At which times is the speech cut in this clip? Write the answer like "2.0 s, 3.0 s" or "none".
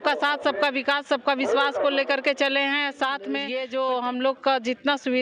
3.5 s